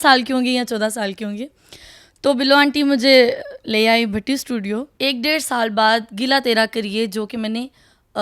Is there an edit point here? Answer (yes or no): yes